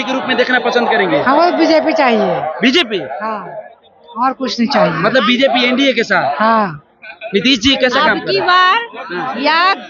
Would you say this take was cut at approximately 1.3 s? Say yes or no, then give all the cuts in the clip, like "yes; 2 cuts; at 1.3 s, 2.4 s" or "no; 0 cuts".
no; 0 cuts